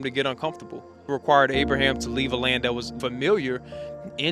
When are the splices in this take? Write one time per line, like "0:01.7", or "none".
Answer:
0:01.1
0:02.9